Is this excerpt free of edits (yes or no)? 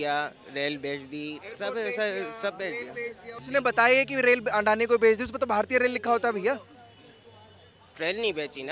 no